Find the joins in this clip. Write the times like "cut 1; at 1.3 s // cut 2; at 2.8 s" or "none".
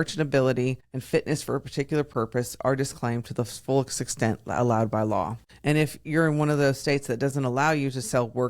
cut 1; at 0.9 s // cut 2; at 5.4 s